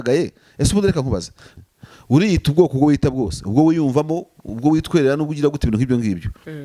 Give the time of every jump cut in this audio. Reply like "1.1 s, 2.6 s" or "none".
1.5 s